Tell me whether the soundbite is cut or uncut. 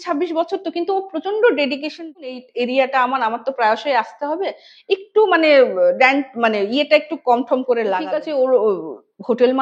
cut